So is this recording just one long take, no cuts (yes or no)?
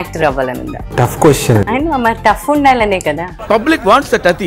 no